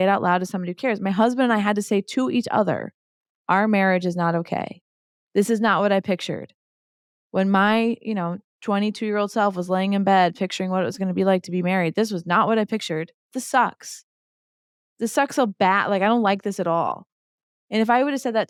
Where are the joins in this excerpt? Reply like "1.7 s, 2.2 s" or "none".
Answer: none